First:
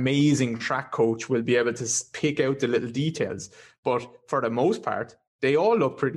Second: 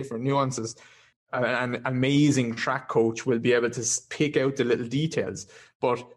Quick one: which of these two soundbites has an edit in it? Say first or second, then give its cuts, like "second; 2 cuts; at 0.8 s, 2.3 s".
second; 1 cut; at 1.1 s